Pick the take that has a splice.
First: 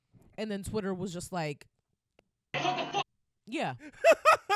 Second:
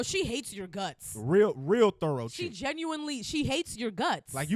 first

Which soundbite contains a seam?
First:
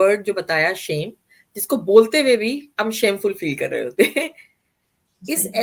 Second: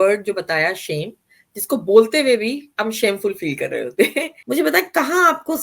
second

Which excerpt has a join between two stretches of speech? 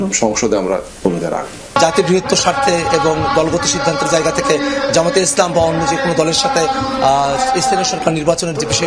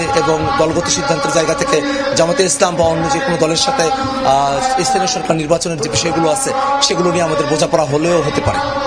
first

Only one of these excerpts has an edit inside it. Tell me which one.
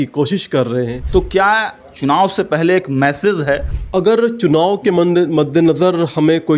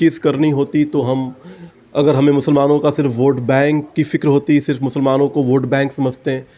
first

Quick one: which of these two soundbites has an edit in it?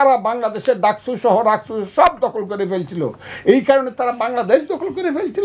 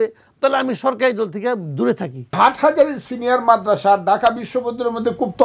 second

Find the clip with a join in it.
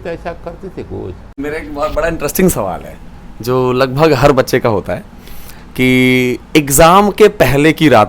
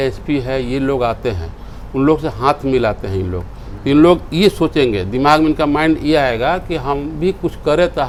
first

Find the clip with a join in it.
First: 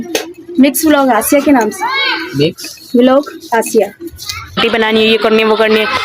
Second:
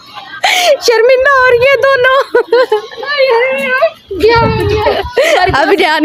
first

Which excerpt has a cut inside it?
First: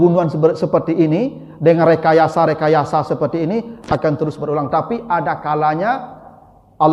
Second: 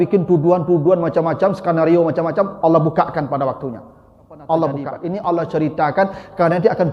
second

